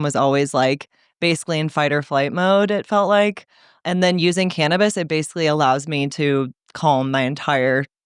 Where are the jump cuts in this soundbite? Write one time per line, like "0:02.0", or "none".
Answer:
0:03.7